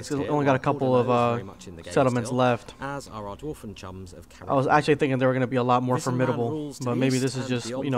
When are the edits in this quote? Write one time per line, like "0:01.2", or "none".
none